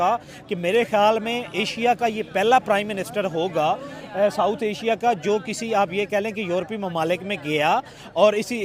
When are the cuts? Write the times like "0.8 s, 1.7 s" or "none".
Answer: none